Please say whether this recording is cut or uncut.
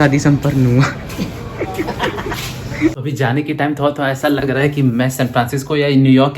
cut